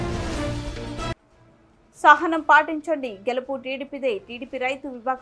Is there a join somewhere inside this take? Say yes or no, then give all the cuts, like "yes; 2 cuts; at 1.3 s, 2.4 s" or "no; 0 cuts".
yes; 1 cut; at 1.0 s